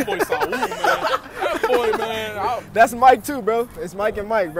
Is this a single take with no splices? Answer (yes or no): yes